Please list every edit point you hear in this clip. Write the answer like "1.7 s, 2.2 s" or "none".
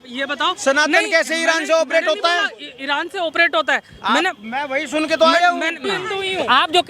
5.9 s